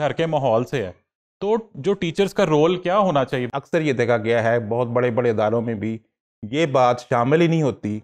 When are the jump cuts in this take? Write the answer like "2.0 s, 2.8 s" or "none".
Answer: 3.5 s